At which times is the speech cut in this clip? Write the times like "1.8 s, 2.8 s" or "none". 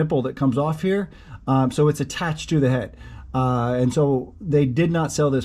none

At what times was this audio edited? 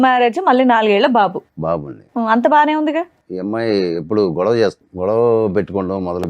3.2 s, 4.9 s

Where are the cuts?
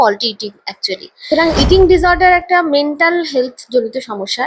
1.4 s

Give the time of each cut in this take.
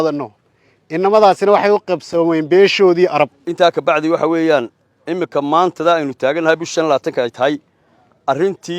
3.4 s

